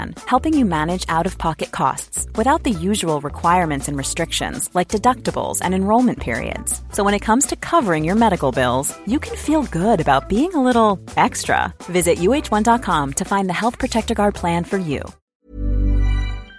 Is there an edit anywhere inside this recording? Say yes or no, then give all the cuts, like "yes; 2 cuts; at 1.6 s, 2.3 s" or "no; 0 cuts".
yes; 1 cut; at 15.2 s